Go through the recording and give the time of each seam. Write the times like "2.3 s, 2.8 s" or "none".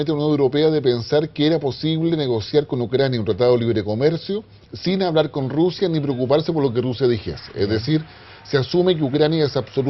none